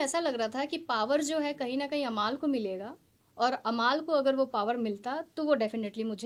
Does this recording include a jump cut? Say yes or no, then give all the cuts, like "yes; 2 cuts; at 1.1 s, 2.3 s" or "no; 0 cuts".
no; 0 cuts